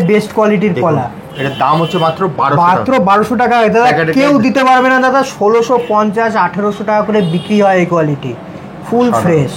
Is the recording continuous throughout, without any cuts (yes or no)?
yes